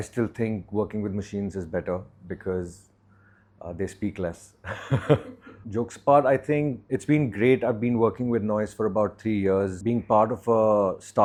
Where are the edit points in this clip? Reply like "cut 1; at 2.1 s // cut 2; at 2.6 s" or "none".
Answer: none